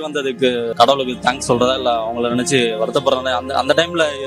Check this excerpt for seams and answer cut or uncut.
uncut